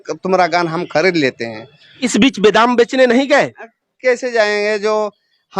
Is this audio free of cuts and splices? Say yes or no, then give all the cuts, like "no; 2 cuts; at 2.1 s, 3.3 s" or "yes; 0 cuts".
no; 1 cut; at 2.0 s